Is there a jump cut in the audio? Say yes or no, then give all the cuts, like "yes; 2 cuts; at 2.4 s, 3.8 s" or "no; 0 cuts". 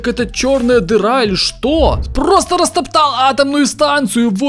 yes; 1 cut; at 2.0 s